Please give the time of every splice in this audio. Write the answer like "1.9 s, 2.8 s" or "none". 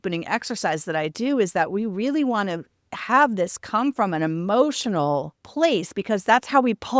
5.4 s